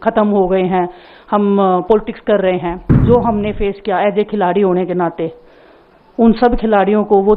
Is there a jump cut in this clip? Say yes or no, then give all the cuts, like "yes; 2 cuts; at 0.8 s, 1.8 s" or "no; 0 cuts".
yes; 1 cut; at 3.0 s